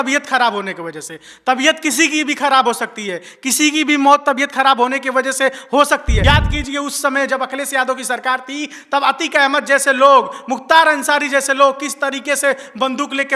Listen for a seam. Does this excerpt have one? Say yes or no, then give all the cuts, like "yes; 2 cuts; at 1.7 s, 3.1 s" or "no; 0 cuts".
yes; 1 cut; at 6.1 s